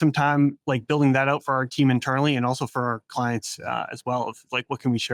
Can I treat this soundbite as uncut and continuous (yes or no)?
yes